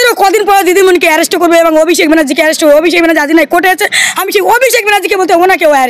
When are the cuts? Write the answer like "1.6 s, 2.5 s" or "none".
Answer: none